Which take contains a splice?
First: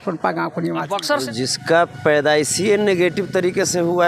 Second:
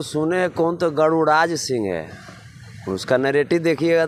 first; 1 cut; at 1.2 s

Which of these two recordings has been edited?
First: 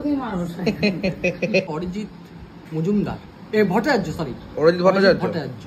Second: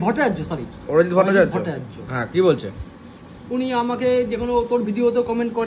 first; 1 cut; at 1.6 s

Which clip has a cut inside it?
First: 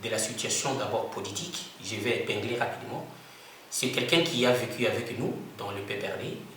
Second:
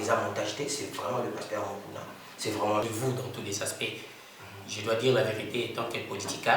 second; 1 cut; at 2.8 s

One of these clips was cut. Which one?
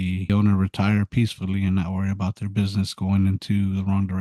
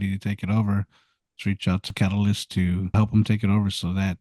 second; 2 cuts; at 1.9 s, 2.9 s

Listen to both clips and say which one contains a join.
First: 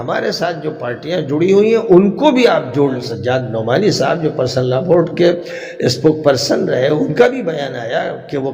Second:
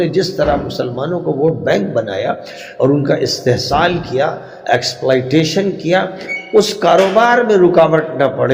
first; 1 cut; at 3.1 s

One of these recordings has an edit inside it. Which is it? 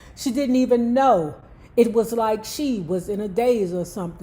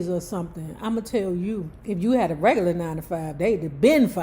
second; 1 cut; at 1.7 s

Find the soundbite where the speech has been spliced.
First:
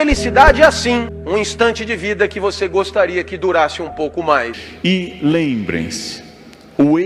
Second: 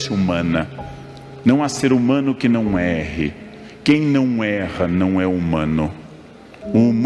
first; 2 cuts; at 1.2 s, 4.6 s

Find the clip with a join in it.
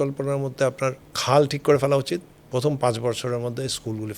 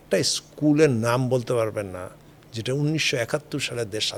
first; 2 cuts; at 1.1 s, 2.4 s

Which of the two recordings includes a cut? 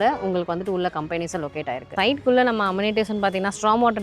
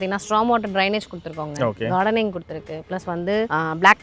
first; 1 cut; at 1.9 s

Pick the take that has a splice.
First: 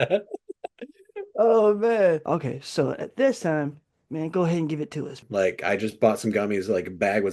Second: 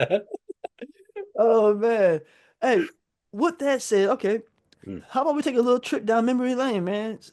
first; 2 cuts; at 2.2 s, 5.2 s

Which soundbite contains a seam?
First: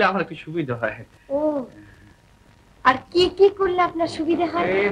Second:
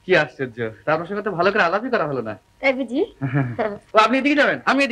second; 1 cut; at 3.8 s

